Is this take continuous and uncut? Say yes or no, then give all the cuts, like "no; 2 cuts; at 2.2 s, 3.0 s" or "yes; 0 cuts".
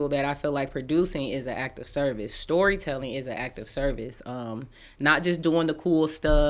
yes; 0 cuts